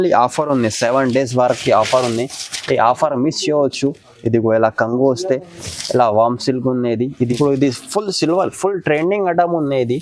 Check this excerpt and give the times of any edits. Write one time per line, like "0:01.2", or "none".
0:07.1